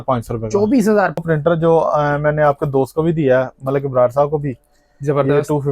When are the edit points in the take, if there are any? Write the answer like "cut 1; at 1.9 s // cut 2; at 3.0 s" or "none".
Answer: cut 1; at 1.2 s